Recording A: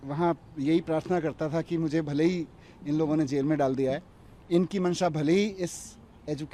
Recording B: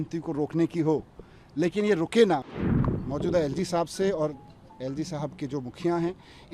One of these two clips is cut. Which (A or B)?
B